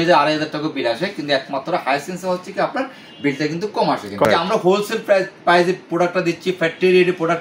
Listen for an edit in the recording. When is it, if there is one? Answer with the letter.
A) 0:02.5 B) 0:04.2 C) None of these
B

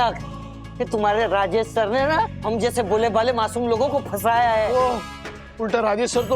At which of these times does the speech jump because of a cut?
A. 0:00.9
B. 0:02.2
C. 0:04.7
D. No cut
C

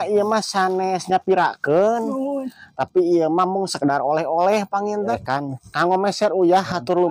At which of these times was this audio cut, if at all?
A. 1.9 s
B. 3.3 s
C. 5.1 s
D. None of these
C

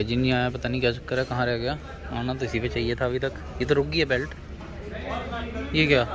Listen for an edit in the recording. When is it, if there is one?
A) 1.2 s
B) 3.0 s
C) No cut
C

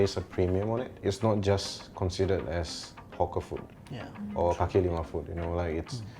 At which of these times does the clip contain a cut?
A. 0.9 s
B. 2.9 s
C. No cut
A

